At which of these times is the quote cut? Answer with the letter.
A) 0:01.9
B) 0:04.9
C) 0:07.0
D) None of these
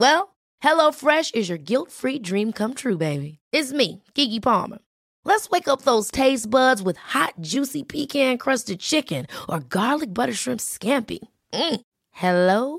D